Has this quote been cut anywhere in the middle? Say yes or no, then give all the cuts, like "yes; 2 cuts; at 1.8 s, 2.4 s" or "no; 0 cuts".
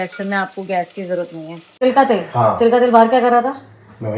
yes; 1 cut; at 1.8 s